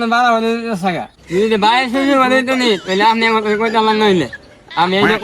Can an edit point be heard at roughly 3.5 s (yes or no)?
no